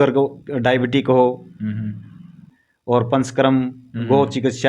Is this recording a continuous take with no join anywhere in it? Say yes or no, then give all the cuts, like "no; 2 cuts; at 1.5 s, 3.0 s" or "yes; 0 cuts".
no; 1 cut; at 2.4 s